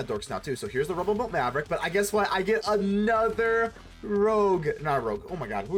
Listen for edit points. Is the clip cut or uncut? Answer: uncut